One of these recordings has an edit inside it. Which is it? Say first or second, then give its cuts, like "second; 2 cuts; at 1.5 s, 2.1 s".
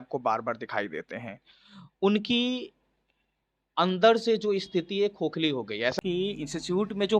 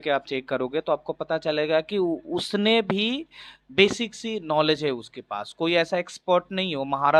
first; 1 cut; at 6.0 s